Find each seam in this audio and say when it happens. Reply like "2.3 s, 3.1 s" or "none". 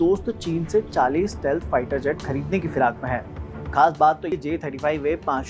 none